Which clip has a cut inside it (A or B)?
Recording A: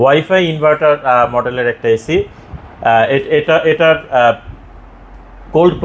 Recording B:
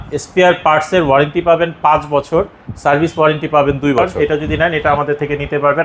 B